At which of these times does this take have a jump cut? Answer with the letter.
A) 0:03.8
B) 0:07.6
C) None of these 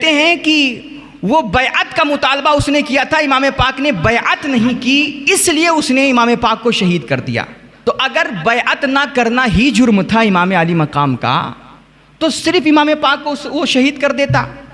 B